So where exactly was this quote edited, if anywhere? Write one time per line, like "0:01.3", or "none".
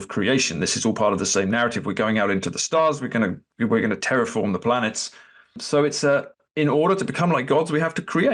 0:05.6
0:06.4